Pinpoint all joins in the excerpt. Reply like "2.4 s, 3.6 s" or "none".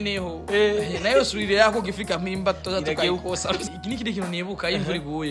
3.6 s

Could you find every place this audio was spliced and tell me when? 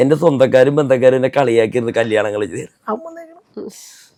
none

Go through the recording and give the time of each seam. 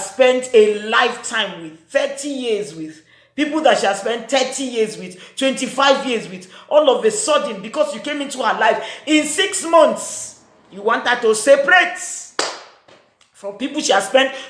none

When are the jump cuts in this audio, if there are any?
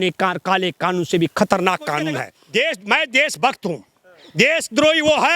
2.3 s

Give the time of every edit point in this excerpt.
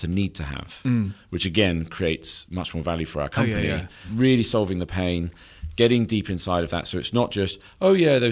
4.0 s

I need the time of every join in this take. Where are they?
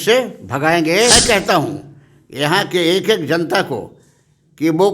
1.1 s

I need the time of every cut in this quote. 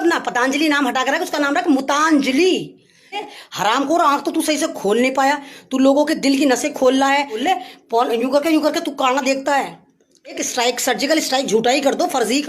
3.2 s, 7.4 s, 10.4 s

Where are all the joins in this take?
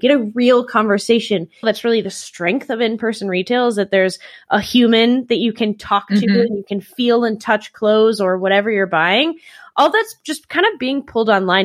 1.6 s

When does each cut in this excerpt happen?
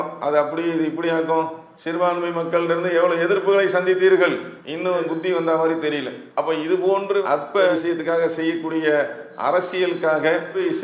7.7 s

